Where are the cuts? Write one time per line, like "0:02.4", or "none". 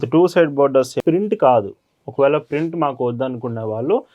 0:01.0